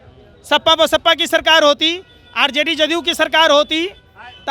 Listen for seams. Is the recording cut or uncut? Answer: uncut